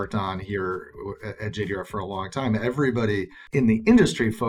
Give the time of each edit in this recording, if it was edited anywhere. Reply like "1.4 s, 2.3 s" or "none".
3.4 s

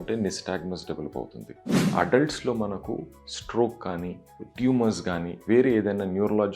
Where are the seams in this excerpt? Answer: 1.9 s

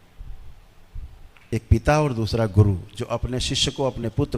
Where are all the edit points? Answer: 1.5 s

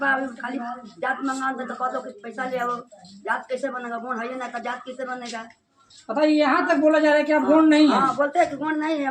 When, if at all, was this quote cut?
none

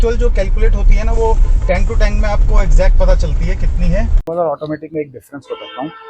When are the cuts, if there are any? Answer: 4.2 s

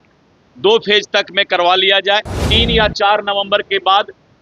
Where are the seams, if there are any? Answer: 2.5 s

